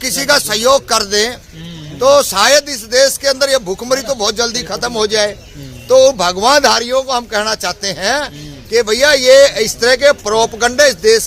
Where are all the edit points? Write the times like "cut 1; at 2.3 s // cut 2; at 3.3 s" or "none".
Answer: none